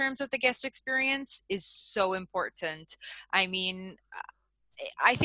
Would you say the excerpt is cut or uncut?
uncut